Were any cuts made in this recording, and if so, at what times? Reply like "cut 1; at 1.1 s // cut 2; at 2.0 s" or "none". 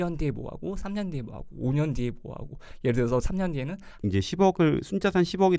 cut 1; at 3.9 s